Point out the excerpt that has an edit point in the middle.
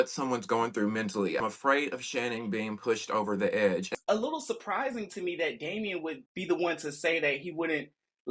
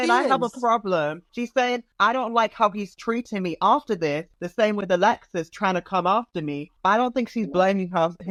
first; 2 cuts; at 1.4 s, 3.9 s

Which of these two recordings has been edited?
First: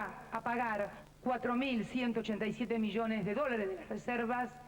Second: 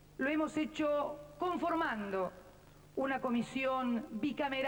first; 1 cut; at 1.0 s

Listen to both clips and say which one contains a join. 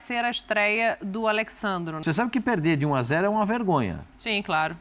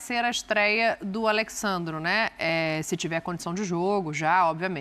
first; 1 cut; at 2.0 s

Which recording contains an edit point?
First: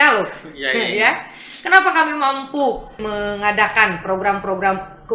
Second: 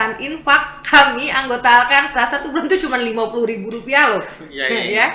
first; 1 cut; at 3.0 s

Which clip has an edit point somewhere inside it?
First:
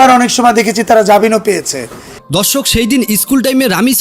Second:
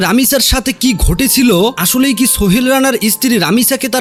first; 1 cut; at 2.2 s

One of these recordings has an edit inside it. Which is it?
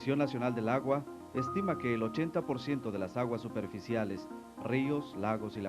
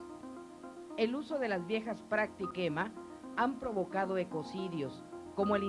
second; 1 cut; at 2.5 s

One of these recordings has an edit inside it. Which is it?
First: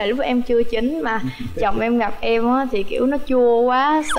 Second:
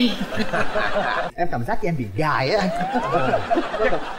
second; 1 cut; at 1.3 s

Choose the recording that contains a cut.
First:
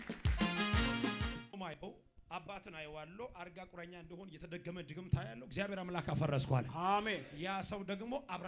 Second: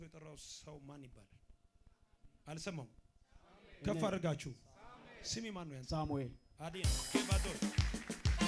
first; 1 cut; at 1.4 s

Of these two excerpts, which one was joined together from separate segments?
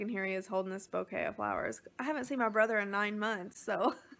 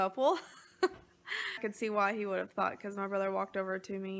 second; 1 cut; at 1.6 s

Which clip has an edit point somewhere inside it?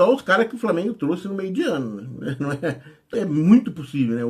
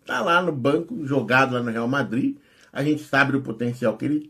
first; 1 cut; at 2.9 s

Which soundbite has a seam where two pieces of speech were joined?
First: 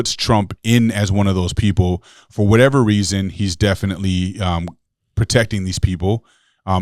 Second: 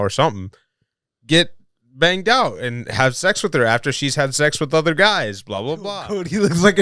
second; 1 cut; at 5.9 s

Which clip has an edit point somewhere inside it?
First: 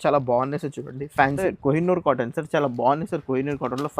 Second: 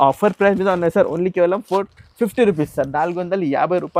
first; 1 cut; at 1.4 s

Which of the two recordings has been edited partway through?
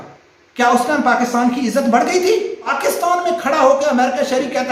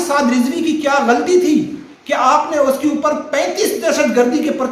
first; 1 cut; at 2.7 s

